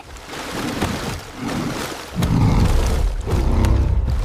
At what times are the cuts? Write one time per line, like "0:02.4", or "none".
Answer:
none